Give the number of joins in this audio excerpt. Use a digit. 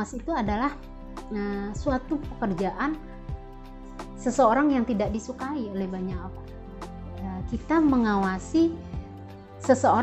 0